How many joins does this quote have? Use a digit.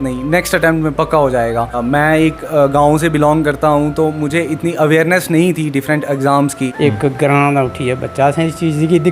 2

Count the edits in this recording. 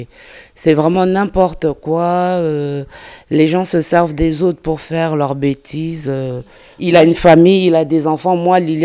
1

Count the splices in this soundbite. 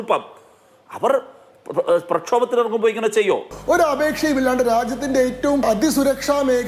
2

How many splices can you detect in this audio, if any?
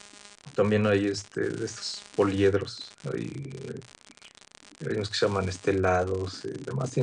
1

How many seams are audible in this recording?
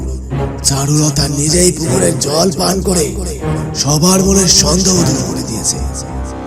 0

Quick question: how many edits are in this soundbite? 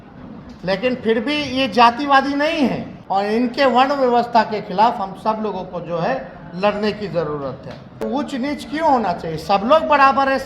2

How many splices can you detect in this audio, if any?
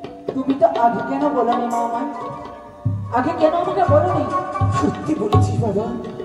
0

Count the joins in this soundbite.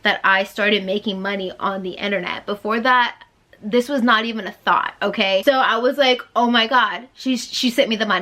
1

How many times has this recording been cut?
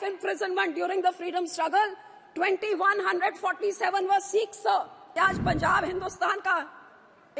1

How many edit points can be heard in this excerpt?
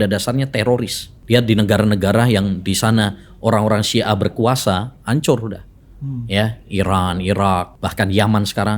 2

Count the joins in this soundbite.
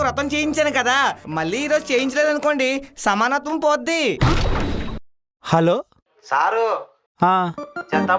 1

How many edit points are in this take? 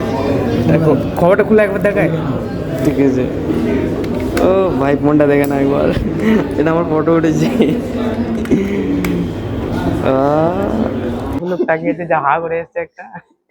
1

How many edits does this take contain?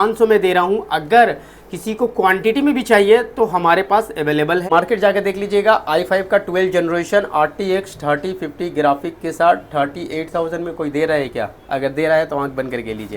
1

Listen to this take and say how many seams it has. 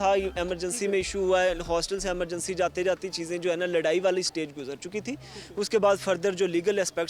0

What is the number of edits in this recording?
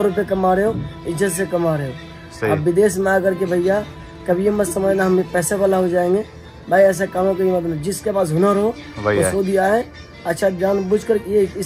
0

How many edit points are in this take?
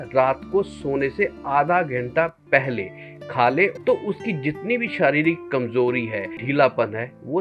2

